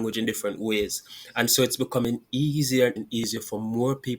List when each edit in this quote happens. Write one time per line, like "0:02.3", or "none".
0:03.0